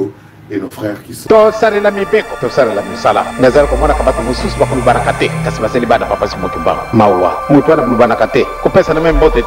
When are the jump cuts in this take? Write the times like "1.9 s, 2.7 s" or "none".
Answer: 1.3 s